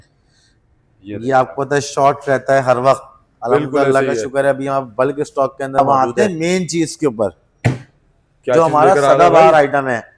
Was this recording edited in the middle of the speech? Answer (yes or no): yes